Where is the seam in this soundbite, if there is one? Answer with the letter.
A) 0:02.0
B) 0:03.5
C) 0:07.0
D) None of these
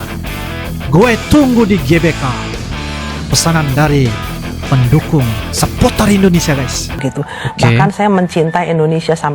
C